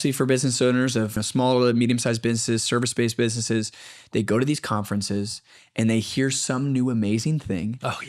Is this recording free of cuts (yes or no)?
no